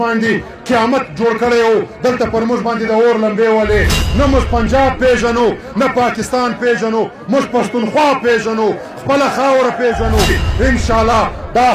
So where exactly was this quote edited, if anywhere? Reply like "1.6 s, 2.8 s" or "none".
4.0 s, 10.3 s